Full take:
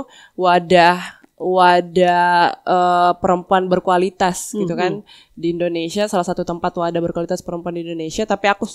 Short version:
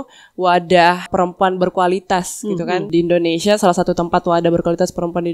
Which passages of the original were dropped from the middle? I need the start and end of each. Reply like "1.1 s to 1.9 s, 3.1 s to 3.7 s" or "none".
1.1 s to 3.2 s, 5.0 s to 5.4 s